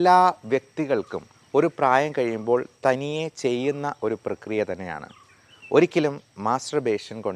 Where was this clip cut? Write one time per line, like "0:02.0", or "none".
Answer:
none